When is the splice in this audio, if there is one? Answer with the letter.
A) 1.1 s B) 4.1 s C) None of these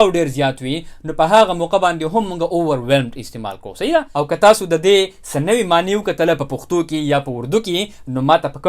B